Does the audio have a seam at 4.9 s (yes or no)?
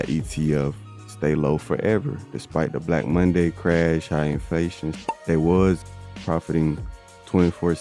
yes